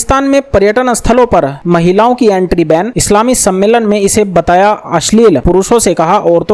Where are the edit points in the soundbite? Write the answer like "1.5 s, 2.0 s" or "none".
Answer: none